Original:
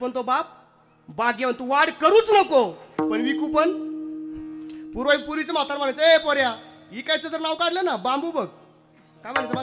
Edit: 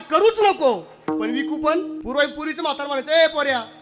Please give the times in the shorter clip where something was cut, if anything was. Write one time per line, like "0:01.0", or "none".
0:02.0